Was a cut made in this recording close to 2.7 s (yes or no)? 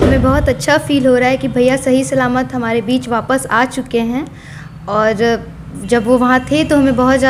no